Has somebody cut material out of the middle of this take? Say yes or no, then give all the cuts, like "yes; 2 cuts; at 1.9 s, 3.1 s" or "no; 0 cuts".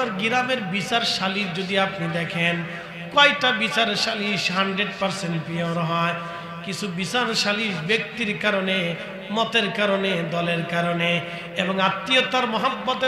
no; 0 cuts